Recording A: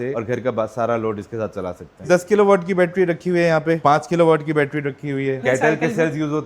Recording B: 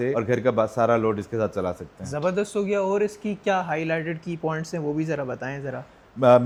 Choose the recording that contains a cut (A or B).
A